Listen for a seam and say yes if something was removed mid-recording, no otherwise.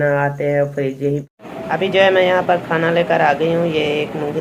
yes